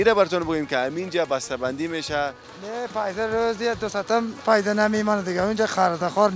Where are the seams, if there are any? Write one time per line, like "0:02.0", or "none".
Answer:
0:02.5